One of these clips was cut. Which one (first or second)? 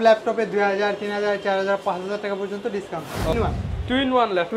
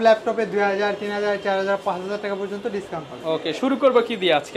first